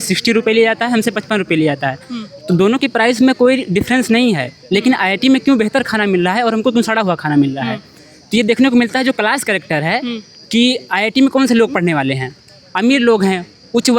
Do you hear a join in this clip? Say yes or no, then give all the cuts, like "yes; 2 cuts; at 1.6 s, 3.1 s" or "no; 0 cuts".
no; 0 cuts